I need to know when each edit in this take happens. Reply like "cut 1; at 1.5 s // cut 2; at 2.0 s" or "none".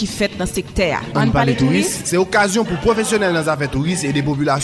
none